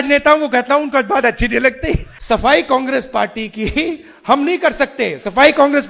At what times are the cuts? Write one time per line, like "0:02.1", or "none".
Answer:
0:02.1